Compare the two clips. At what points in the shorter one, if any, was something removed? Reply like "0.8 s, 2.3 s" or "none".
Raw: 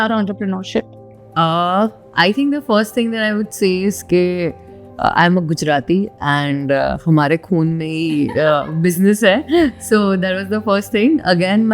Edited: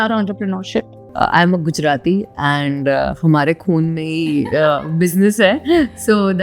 1.0 s